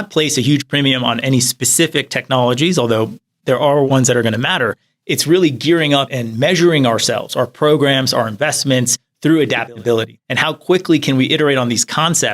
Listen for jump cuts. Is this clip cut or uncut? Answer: cut